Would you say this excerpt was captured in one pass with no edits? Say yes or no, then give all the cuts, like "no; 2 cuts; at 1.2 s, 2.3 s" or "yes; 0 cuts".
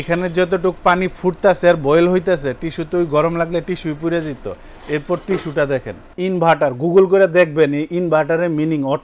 no; 1 cut; at 6.1 s